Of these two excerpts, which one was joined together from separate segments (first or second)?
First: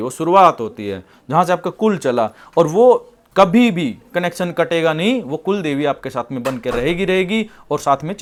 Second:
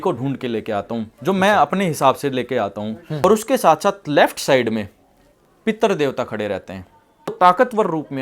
second